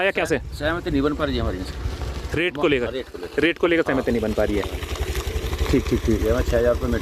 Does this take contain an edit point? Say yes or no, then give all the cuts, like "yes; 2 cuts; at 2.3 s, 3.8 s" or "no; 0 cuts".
no; 0 cuts